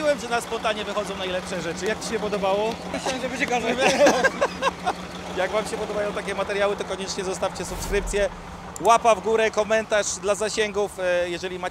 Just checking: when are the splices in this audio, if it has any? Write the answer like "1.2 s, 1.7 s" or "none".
3.0 s, 5.2 s